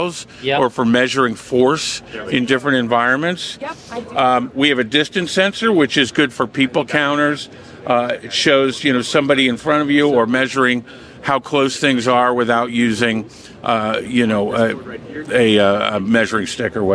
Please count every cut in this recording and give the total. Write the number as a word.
zero